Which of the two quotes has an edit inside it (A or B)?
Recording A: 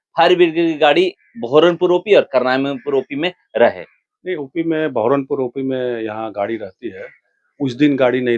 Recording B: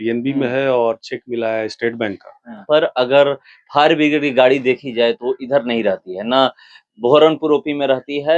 B